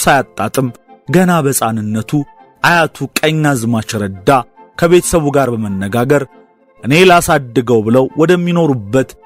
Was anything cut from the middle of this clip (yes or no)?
no